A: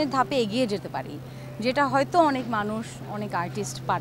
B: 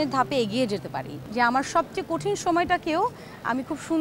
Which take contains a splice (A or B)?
B